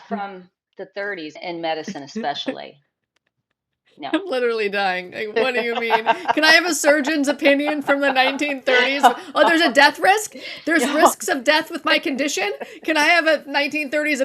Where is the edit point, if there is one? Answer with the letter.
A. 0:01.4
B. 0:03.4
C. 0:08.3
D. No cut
A